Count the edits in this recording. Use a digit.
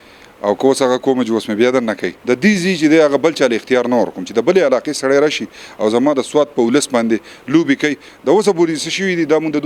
1